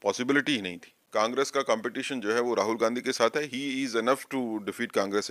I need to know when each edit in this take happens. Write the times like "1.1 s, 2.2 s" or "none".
1.0 s